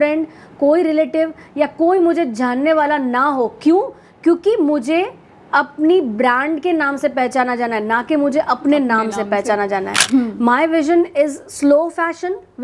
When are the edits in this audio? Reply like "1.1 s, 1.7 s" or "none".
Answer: 10.0 s